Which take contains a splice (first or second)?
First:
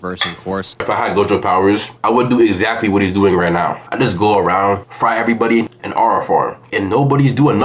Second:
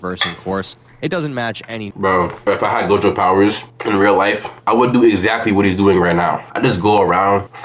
first